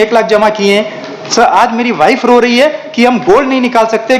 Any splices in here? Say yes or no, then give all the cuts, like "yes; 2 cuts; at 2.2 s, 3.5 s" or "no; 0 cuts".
no; 0 cuts